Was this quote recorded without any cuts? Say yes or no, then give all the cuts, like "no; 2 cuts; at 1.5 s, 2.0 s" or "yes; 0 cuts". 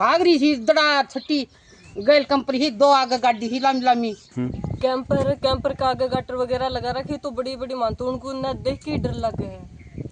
no; 1 cut; at 4.6 s